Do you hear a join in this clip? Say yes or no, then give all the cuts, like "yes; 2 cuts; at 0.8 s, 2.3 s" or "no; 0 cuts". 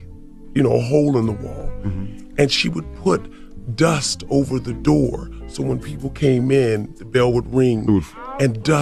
no; 0 cuts